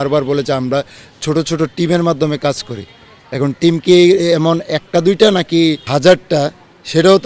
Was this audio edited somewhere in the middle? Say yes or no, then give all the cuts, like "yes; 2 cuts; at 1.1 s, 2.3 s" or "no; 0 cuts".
yes; 1 cut; at 5.8 s